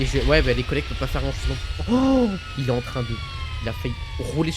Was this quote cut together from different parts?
no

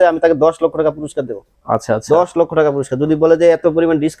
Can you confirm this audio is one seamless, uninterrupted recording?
yes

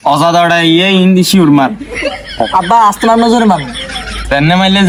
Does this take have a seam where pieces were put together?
no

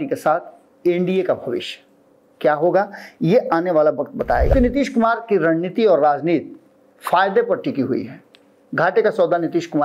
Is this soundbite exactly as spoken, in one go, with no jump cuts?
no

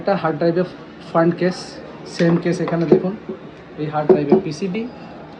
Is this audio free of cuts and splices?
yes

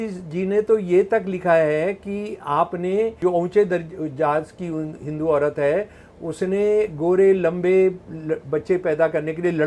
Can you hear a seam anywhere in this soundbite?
yes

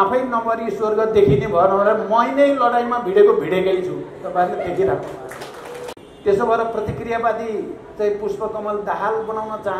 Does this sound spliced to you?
yes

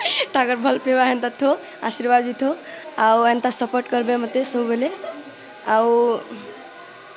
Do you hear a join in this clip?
no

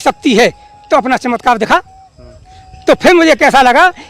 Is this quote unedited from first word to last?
yes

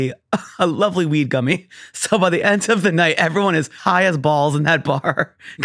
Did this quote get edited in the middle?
yes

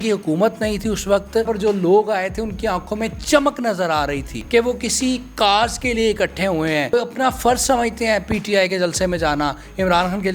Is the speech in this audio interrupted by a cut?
yes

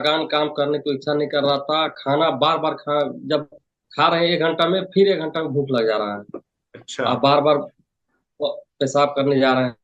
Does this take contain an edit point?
no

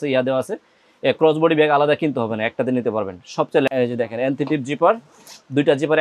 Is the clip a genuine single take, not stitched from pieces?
no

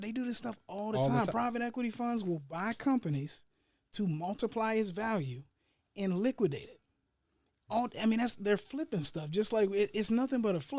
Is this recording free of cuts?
yes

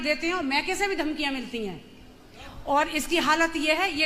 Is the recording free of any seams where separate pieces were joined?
yes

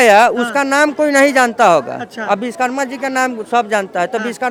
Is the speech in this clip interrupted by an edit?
no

